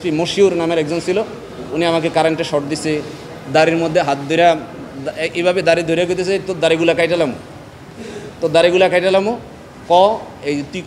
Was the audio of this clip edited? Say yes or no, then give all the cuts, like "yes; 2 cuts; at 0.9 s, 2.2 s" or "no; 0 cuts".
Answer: no; 0 cuts